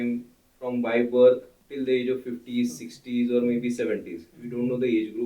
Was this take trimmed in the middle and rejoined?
yes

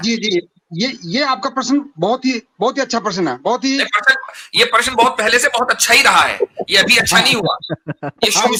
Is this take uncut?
yes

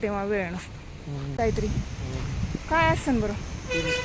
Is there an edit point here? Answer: yes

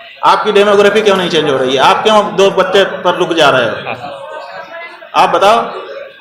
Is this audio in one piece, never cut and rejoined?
yes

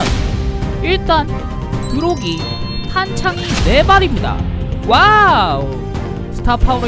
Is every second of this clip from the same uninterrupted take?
yes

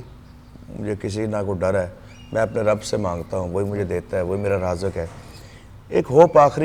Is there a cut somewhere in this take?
no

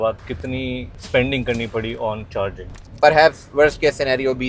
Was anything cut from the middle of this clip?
yes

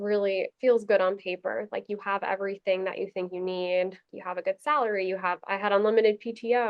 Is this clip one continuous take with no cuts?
no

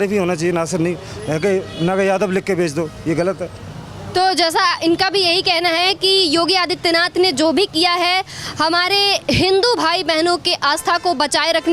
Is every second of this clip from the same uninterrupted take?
yes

